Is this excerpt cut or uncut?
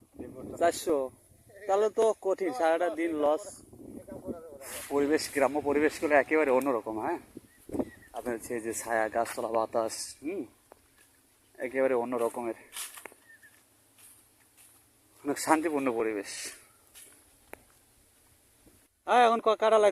cut